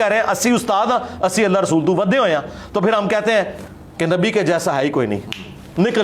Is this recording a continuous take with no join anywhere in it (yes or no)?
yes